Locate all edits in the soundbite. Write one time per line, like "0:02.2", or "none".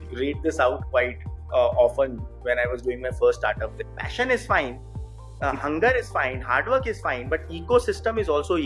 0:03.7